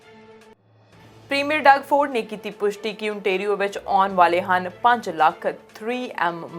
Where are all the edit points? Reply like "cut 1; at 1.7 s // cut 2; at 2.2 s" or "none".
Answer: cut 1; at 1.0 s